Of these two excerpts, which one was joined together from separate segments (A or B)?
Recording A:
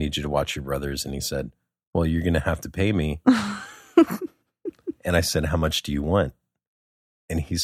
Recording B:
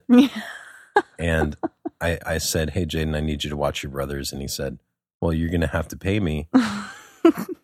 B